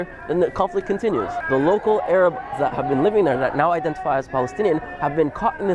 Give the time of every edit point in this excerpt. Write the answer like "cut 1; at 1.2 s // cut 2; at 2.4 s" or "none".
cut 1; at 1.4 s